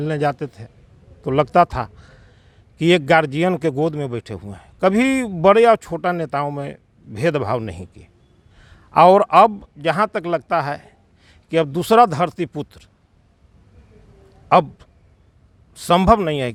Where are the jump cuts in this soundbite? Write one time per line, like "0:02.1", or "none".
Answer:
none

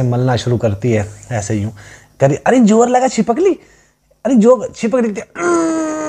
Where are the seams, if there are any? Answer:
none

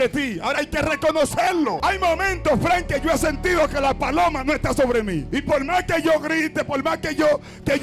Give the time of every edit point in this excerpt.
0:01.8
0:05.2

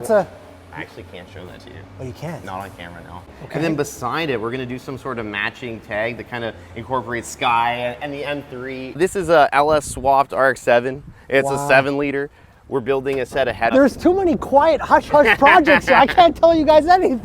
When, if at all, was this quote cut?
0:03.4
0:09.0
0:13.7

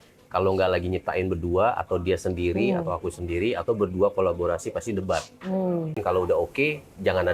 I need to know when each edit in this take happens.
0:06.0

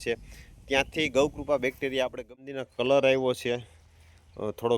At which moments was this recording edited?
0:02.5

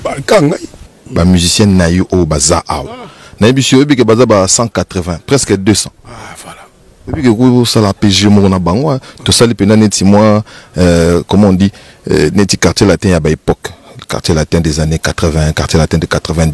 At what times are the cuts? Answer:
0:00.9

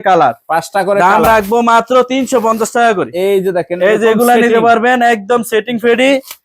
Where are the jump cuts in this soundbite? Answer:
none

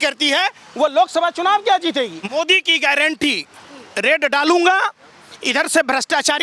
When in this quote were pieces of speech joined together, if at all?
0:02.2

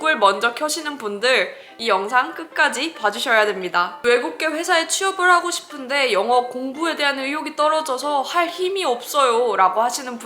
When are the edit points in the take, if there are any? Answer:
0:01.7
0:03.9

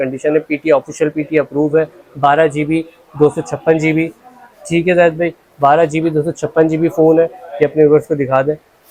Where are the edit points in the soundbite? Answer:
none

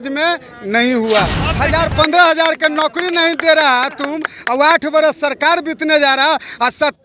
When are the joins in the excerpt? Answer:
0:01.5

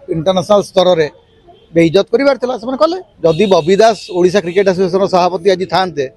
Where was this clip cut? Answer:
0:03.1

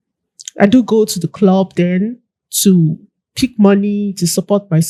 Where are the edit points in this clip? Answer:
none

